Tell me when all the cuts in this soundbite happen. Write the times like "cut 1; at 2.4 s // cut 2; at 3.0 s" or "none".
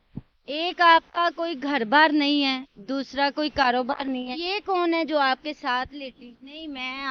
none